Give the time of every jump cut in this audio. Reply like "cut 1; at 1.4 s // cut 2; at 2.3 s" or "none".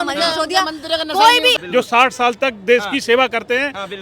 cut 1; at 1.6 s